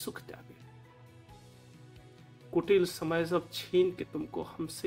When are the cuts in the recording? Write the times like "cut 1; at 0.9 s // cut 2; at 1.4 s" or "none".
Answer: cut 1; at 0.8 s // cut 2; at 2.4 s